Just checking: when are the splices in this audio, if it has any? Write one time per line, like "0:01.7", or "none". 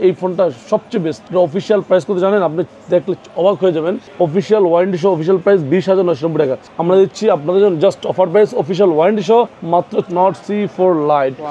0:01.2
0:04.0
0:06.7
0:10.1